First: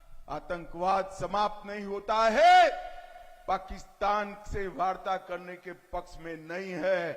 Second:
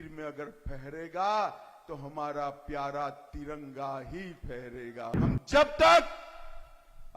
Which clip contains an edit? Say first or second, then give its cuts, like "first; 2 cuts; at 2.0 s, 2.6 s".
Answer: second; 1 cut; at 5.2 s